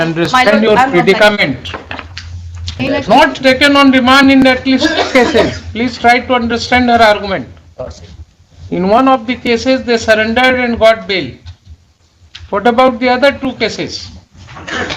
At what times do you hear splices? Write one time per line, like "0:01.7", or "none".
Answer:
0:02.8